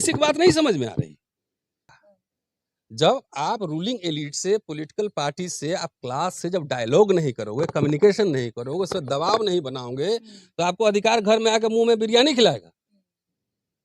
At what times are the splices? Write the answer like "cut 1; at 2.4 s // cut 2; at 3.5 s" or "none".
cut 1; at 1.9 s